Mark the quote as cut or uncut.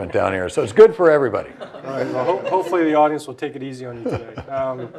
uncut